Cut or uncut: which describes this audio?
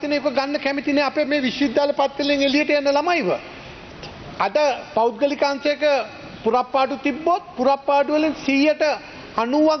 uncut